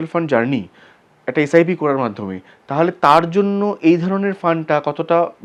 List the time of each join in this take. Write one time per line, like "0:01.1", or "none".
none